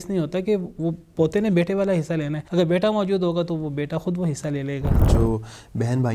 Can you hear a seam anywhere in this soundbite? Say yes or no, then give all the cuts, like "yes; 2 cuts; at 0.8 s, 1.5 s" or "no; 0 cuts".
yes; 2 cuts; at 2.4 s, 5.0 s